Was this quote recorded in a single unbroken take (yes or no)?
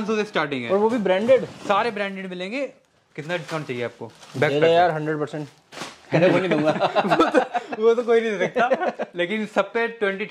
yes